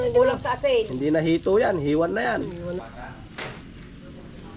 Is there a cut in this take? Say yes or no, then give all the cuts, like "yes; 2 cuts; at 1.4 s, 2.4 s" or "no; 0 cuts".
yes; 1 cut; at 2.8 s